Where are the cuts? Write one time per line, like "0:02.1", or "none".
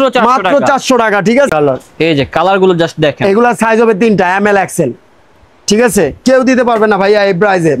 0:01.5